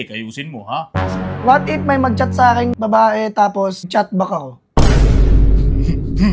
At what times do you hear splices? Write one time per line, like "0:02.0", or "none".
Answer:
0:02.7
0:03.9

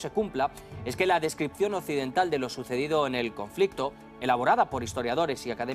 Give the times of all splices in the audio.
0:03.9

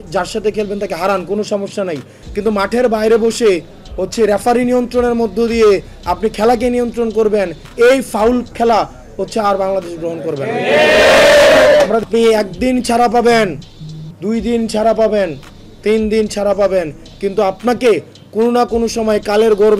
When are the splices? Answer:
0:12.0

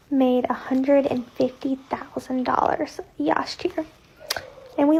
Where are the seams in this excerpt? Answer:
none

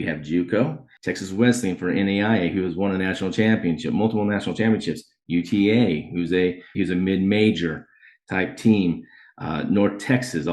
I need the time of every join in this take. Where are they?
0:00.9
0:06.8

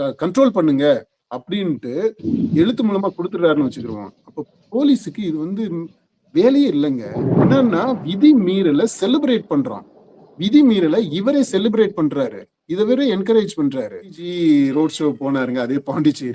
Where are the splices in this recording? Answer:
0:07.3
0:14.2

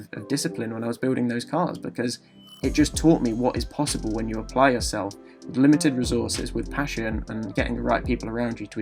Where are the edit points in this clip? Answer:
none

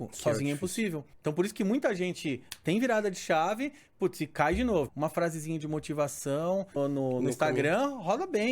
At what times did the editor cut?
0:01.1
0:04.9
0:06.7

